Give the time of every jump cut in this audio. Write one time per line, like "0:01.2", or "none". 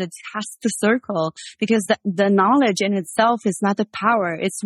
none